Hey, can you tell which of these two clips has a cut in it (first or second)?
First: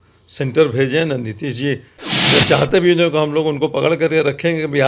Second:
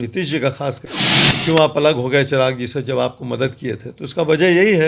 second